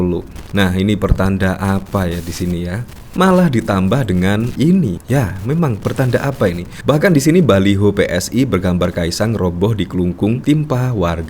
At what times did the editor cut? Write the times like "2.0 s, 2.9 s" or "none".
3.1 s